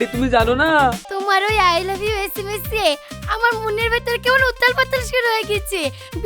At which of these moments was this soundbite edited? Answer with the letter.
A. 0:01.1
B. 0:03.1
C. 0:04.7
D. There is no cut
A